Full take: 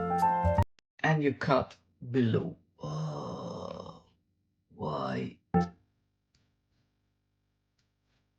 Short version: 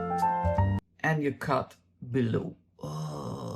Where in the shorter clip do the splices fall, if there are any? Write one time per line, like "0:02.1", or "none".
none